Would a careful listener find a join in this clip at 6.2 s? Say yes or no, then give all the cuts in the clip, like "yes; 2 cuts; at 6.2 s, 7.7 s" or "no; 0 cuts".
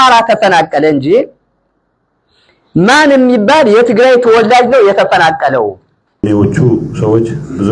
yes; 1 cut; at 6.2 s